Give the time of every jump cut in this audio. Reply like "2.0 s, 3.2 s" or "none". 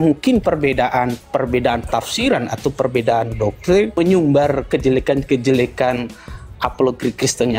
3.9 s